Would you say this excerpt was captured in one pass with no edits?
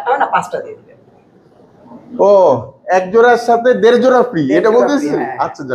yes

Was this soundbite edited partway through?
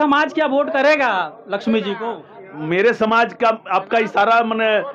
no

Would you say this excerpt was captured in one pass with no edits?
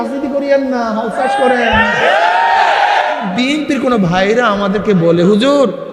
no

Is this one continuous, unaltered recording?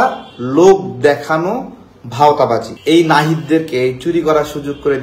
no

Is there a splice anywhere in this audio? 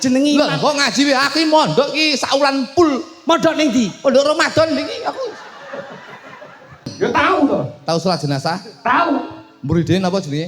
yes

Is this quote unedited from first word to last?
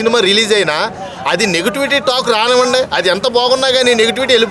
yes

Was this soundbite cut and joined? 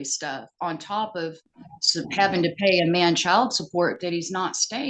no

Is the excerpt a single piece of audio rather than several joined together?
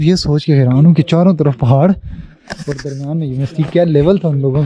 yes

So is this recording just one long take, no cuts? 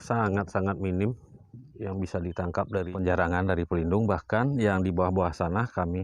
no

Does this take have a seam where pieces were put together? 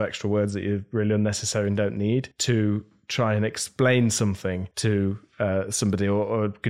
yes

